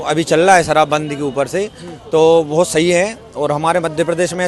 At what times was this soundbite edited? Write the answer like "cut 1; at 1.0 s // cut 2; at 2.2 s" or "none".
none